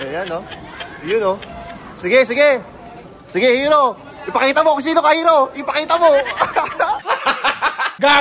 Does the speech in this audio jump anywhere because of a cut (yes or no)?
no